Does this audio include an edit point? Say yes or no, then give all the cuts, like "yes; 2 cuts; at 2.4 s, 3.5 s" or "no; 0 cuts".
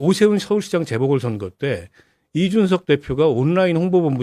no; 0 cuts